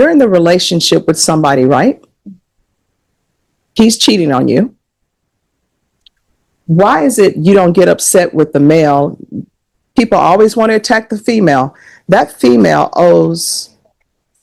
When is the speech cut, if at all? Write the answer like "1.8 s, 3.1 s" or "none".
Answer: none